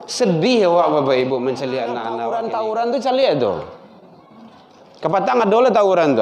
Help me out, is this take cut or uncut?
cut